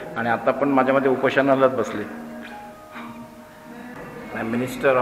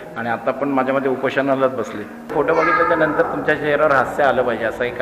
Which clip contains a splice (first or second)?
second